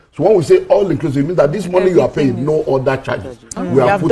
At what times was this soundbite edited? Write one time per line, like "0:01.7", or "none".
none